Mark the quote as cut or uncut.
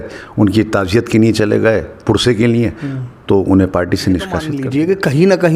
cut